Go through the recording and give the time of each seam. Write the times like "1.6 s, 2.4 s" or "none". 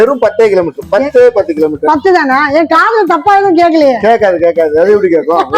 none